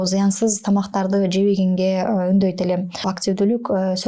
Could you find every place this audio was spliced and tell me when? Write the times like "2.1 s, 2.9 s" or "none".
3.1 s